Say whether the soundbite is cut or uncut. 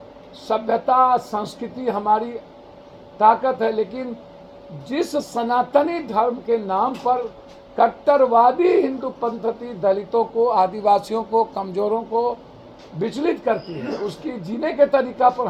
uncut